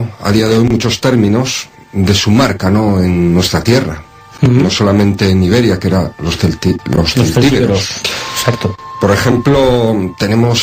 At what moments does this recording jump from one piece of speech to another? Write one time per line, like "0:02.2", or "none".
0:01.8